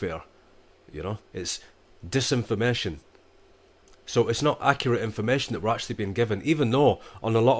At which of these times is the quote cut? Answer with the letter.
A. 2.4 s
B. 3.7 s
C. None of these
A